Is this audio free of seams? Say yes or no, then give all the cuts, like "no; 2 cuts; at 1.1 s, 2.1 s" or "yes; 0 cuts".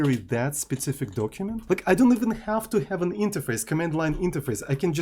no; 1 cut; at 1.6 s